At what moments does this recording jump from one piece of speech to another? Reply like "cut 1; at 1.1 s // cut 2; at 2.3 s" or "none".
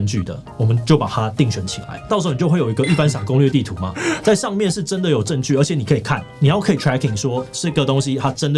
cut 1; at 2.1 s // cut 2; at 7.6 s